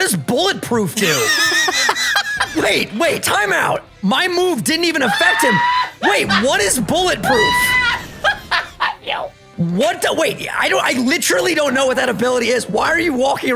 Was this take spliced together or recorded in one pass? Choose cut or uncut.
uncut